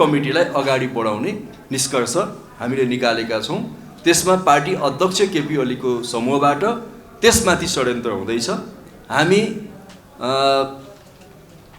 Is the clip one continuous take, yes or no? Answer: yes